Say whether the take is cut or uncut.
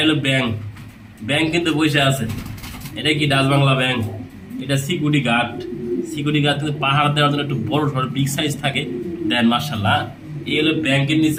uncut